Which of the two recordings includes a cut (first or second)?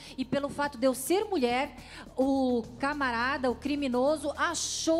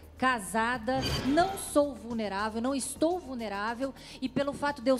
second